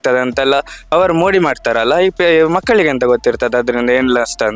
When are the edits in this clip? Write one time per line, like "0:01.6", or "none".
none

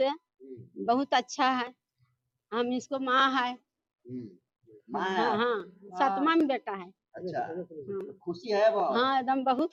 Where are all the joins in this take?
none

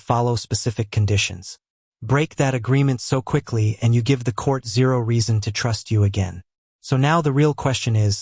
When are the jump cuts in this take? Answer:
none

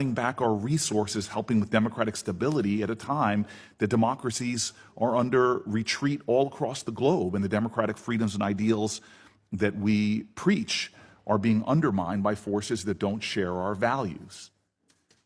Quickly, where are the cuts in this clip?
none

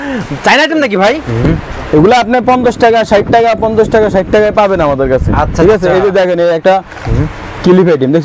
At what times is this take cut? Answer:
0:01.3

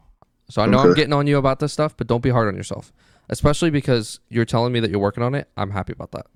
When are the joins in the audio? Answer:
none

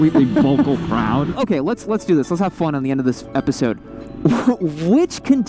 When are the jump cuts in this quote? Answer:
0:01.3

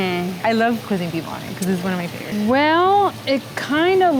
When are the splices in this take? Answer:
0:00.8
0:02.3

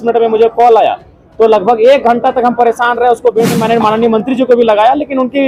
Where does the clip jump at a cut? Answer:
0:03.5

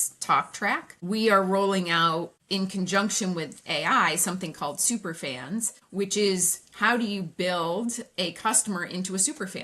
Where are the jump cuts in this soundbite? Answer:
0:00.9
0:02.4
0:05.8

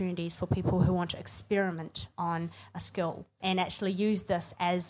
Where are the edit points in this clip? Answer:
0:03.4

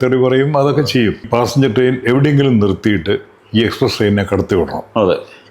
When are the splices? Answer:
0:01.3

